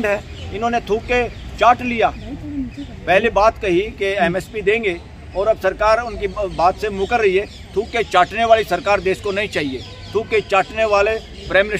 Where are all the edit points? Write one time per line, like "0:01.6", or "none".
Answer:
none